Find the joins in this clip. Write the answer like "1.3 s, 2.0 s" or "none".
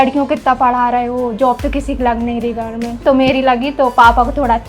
3.0 s